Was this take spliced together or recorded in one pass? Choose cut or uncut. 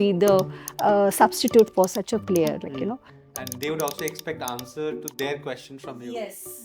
cut